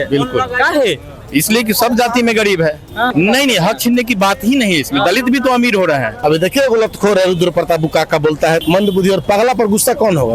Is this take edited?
yes; 3 cuts; at 3.1 s, 6.1 s, 8.6 s

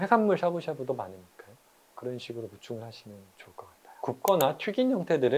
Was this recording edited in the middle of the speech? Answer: yes; 1 cut; at 4.0 s

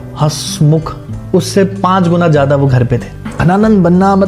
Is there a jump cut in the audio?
yes; 1 cut; at 3.3 s

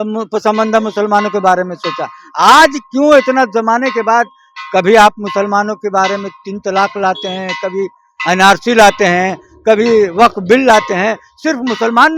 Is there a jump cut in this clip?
no; 0 cuts

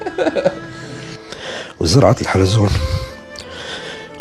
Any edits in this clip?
yes; 1 cut; at 1.2 s

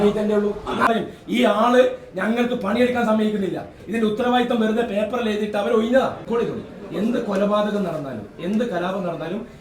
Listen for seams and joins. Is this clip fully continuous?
no; 2 cuts; at 0.9 s, 6.2 s

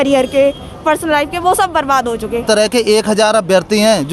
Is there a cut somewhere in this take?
yes; 1 cut; at 2.4 s

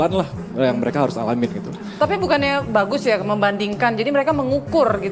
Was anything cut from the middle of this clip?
no; 0 cuts

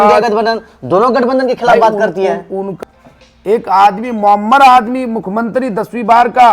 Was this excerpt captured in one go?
no; 1 cut; at 2.7 s

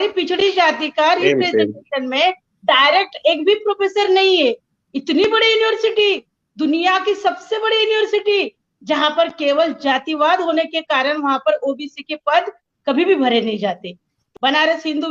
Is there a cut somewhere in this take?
yes; 1 cut; at 14.2 s

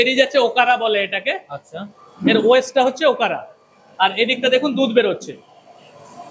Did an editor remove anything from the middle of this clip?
no; 0 cuts

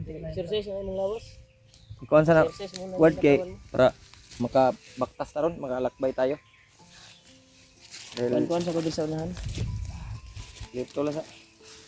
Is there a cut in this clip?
no; 0 cuts

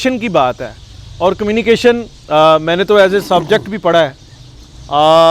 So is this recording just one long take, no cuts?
yes; 0 cuts

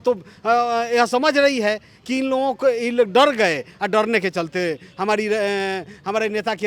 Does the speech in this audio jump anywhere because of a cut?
no; 0 cuts

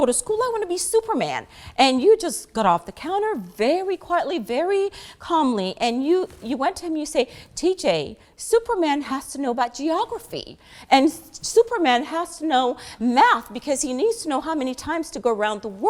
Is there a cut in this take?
no; 0 cuts

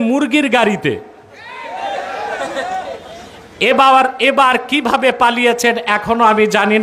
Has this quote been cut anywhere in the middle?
no; 0 cuts

